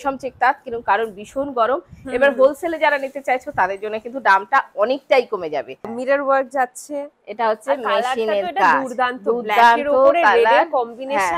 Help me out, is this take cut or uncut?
cut